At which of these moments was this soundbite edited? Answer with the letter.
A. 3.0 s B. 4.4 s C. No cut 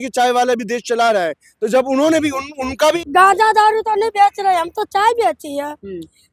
A